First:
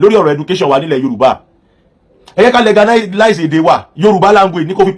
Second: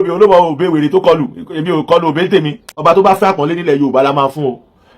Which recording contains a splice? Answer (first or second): second